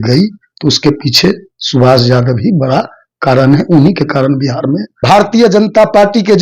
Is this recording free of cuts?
no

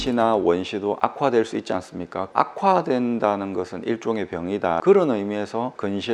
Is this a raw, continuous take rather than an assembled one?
yes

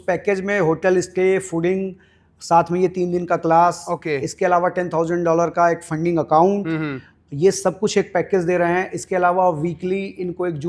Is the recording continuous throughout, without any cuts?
yes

